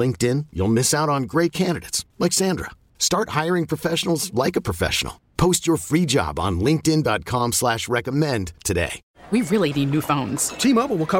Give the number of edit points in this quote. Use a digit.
1